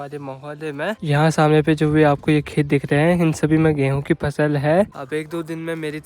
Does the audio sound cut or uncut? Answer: cut